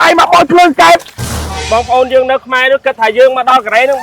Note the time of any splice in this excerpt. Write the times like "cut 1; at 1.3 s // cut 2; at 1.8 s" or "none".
cut 1; at 1.2 s